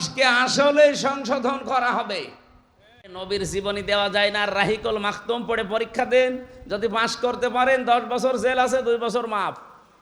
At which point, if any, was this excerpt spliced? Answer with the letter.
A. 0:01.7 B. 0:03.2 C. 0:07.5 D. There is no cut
B